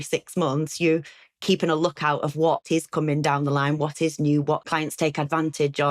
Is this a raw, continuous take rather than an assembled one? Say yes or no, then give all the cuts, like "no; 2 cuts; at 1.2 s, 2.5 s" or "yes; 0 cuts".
no; 2 cuts; at 2.6 s, 4.7 s